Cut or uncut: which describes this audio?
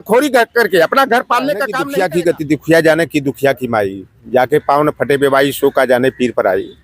cut